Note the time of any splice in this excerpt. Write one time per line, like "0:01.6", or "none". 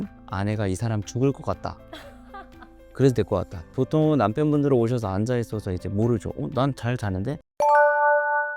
0:07.4